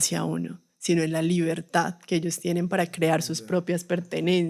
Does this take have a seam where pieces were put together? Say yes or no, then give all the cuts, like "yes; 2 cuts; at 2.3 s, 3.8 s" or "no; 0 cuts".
no; 0 cuts